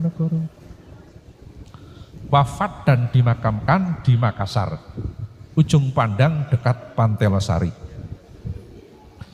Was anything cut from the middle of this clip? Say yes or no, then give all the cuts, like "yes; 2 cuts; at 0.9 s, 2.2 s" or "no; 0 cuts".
no; 0 cuts